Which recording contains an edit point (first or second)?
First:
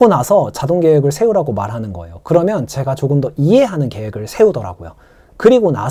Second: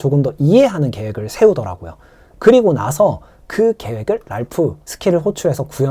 second